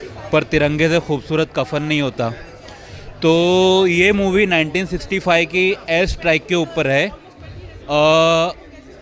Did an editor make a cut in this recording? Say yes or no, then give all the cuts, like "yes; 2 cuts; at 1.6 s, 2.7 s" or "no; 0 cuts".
no; 0 cuts